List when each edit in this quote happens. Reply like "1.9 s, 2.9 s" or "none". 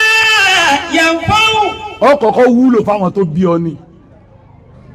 none